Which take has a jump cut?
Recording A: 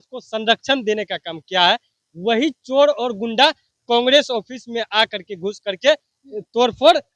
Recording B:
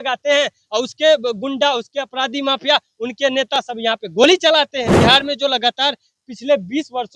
B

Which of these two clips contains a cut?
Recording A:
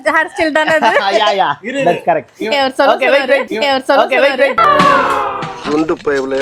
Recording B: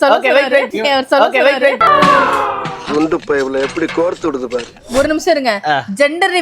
B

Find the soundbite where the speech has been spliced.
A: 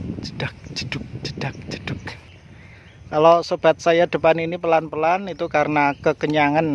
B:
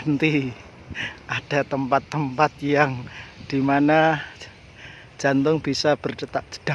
A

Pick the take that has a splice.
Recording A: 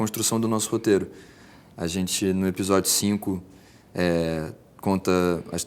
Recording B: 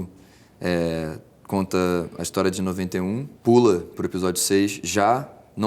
B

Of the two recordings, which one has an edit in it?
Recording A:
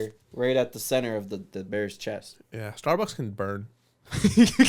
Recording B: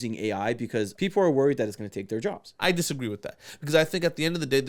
B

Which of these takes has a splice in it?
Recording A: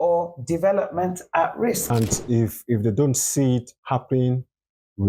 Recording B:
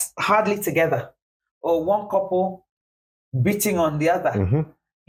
A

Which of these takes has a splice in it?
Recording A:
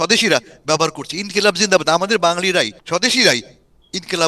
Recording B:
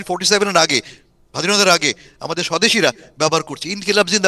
A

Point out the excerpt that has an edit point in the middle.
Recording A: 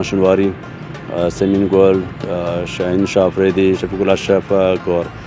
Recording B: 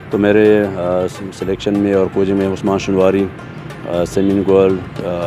A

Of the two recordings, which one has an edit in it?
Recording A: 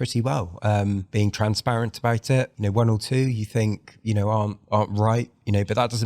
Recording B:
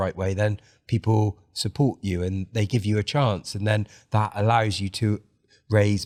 A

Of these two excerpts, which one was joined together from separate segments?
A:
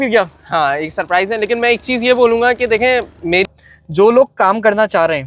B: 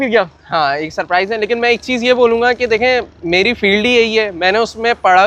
A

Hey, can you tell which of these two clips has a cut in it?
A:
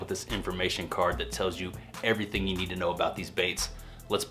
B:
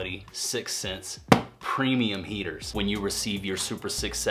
B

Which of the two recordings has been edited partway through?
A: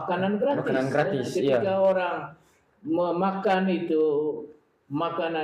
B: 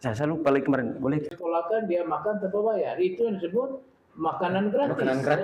B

